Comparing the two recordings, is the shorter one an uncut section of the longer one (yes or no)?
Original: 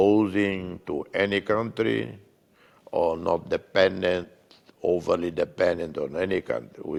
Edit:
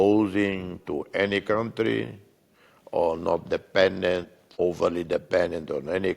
no